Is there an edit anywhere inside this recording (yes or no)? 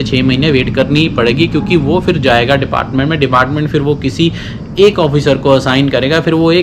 no